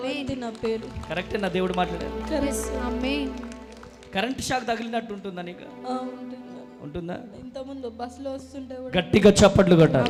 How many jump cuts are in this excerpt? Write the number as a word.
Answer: zero